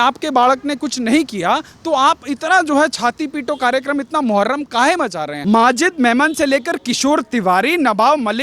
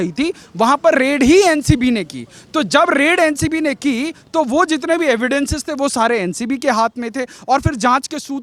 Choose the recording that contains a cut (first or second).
first